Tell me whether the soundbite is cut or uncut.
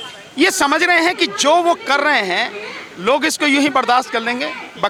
uncut